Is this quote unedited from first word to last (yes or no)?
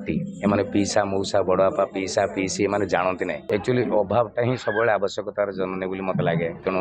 no